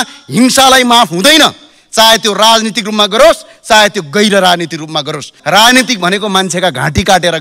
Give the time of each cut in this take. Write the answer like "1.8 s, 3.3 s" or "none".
5.3 s